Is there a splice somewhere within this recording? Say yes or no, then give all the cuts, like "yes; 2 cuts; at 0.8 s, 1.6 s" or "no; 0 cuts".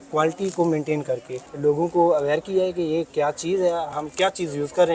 yes; 2 cuts; at 1.3 s, 4.0 s